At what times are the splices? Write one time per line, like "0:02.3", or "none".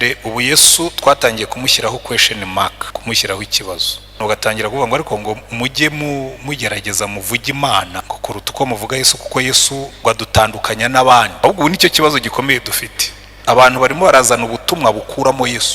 0:02.8
0:04.2
0:07.9
0:09.9
0:11.4